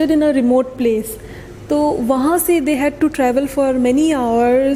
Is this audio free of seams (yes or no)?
yes